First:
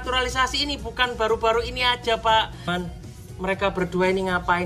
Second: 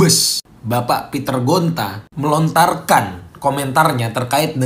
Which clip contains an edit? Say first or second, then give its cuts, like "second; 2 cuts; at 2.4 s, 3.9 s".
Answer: first; 1 cut; at 2.7 s